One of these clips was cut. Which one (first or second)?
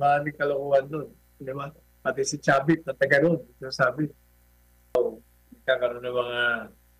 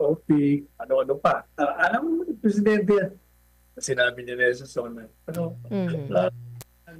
first